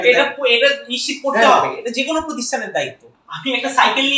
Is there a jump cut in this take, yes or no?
yes